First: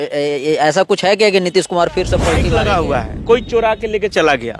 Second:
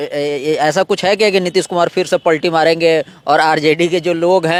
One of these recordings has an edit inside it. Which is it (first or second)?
first